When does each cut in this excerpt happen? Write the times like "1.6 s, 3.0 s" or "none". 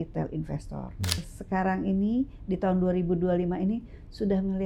1.3 s